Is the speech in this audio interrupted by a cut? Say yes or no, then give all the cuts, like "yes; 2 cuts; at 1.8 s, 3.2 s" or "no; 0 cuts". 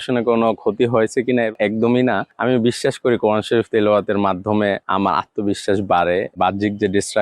yes; 4 cuts; at 1.5 s, 2.3 s, 4.8 s, 6.4 s